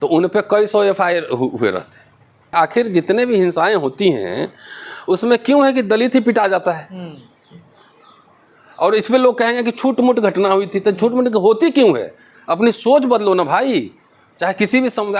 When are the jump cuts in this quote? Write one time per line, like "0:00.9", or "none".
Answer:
0:02.5